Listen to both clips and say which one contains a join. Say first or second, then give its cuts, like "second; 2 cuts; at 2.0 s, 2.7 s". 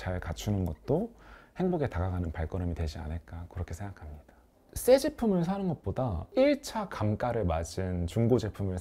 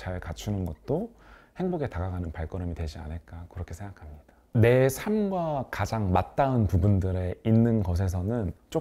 first; 2 cuts; at 4.4 s, 6.2 s